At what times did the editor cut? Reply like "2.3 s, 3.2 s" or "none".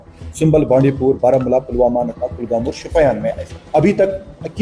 3.6 s